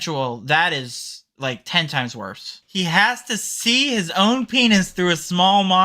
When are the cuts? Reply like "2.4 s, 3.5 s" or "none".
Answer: 2.5 s